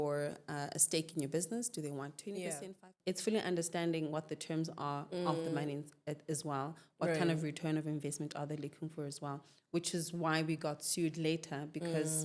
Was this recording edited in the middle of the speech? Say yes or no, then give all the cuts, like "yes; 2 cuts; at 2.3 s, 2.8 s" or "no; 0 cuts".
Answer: yes; 1 cut; at 2.9 s